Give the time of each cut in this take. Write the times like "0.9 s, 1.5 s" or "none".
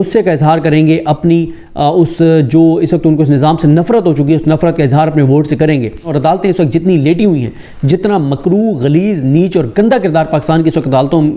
6.1 s